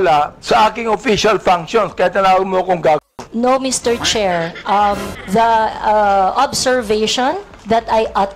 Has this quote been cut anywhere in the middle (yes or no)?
no